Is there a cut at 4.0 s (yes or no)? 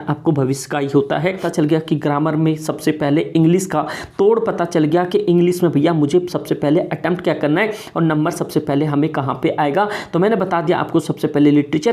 no